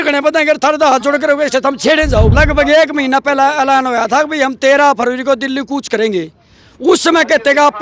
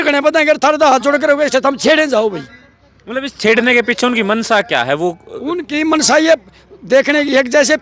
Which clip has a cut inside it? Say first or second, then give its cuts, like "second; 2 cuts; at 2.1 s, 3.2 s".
first; 1 cut; at 2.3 s